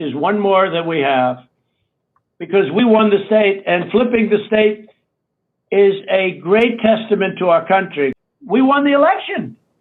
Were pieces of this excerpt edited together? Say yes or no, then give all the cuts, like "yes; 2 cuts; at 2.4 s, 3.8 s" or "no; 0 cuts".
yes; 1 cut; at 8.2 s